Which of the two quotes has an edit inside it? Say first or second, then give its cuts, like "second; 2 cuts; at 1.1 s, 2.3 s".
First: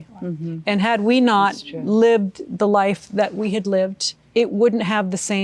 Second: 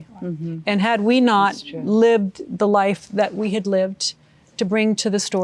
first; 1 cut; at 4.2 s